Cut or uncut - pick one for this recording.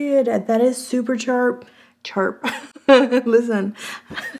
uncut